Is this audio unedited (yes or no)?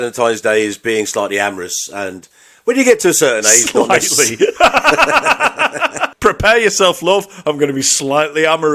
no